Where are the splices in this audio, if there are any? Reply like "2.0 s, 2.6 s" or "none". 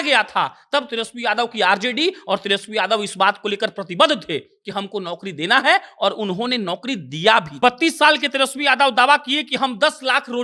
7.5 s